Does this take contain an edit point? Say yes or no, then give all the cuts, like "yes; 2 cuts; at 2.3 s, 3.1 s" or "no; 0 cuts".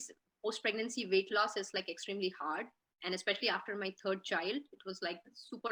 no; 0 cuts